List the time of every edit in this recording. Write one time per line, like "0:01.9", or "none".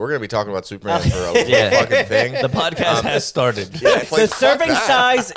0:04.1